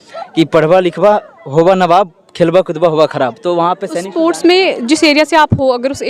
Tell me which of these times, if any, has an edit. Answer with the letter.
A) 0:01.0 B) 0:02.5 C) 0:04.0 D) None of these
C